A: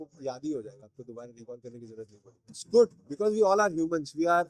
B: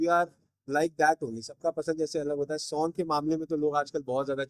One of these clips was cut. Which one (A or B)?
A